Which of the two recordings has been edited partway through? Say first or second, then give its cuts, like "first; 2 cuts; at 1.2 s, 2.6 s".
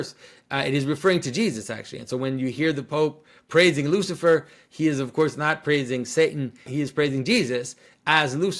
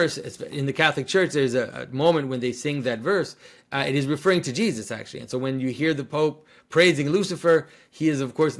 first; 1 cut; at 6.6 s